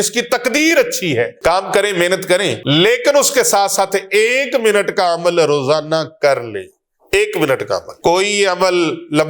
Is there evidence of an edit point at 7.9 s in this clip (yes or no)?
yes